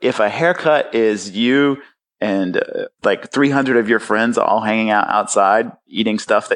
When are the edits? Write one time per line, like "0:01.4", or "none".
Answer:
0:02.9

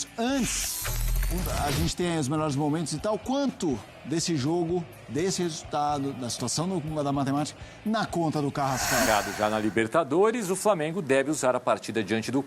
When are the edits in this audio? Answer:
0:09.1

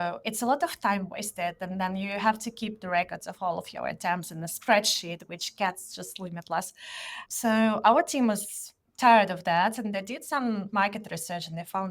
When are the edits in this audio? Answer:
none

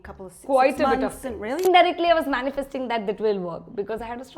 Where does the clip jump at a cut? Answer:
0:01.6

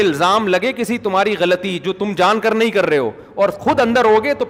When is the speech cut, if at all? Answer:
none

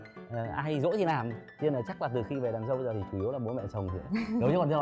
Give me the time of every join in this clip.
none

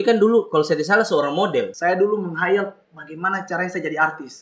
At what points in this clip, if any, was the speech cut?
0:01.7

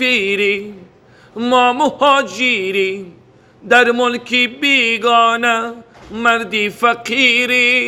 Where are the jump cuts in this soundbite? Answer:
none

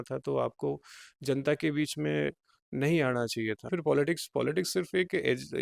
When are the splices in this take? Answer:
0:03.7

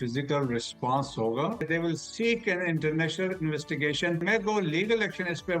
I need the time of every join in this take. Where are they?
0:01.6
0:04.2

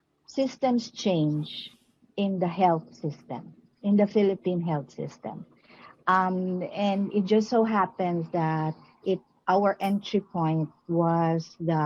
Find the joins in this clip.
none

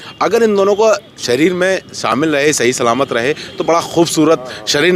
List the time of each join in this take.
none

